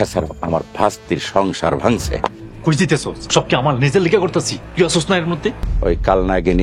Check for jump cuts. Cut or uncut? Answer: cut